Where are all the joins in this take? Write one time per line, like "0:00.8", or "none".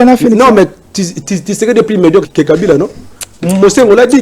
0:02.3